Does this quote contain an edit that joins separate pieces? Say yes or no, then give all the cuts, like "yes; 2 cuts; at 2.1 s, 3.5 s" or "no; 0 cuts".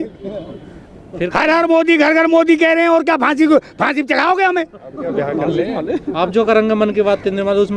no; 0 cuts